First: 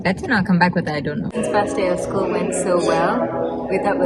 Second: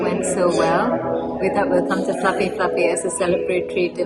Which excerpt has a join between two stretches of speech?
first; 1 cut; at 1.3 s

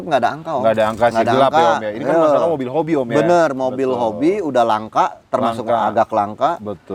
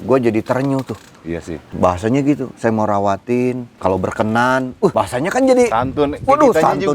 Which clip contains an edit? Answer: second; 3 cuts; at 1.6 s, 3.7 s, 4.9 s

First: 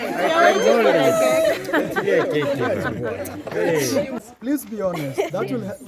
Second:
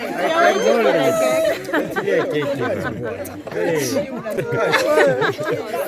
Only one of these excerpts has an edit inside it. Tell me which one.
first; 1 cut; at 4.2 s

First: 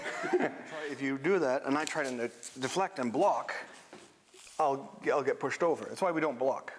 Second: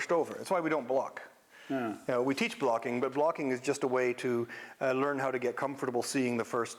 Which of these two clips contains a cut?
first; 1 cut; at 0.9 s

